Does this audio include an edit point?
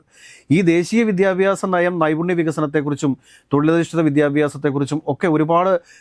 no; 0 cuts

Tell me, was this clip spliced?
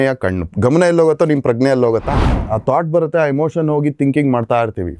yes; 1 cut; at 2.3 s

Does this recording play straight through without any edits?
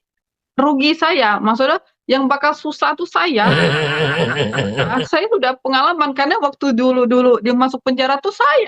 no; 2 cuts; at 3.5 s, 4.9 s

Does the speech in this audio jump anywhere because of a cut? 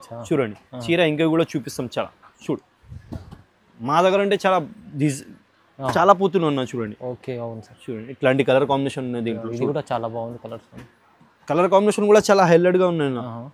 no; 0 cuts

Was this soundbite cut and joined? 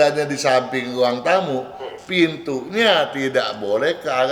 no; 0 cuts

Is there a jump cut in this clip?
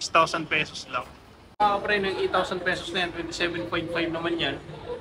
yes; 1 cut; at 1.6 s

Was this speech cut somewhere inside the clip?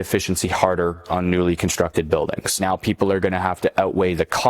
yes; 2 cuts; at 1.0 s, 2.6 s

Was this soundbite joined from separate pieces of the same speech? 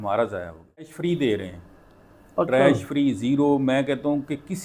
yes; 1 cut; at 0.9 s

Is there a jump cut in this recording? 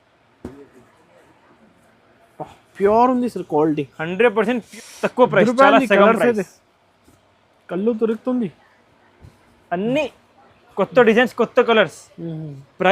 yes; 1 cut; at 4.7 s

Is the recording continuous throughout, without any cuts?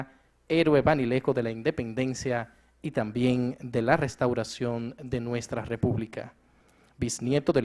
no; 1 cut; at 3.5 s

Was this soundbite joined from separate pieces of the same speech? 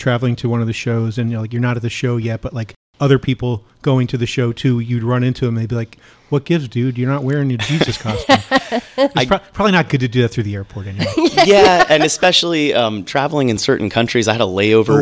no; 0 cuts

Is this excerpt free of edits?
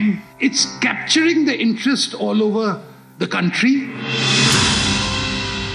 no; 1 cut; at 4.0 s

